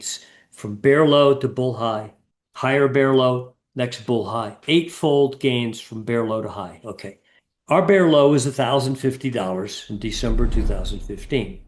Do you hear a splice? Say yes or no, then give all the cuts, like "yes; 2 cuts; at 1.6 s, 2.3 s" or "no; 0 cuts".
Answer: no; 0 cuts